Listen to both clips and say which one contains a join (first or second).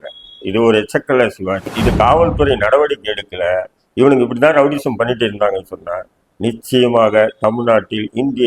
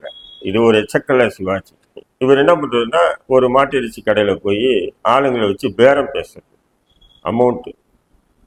first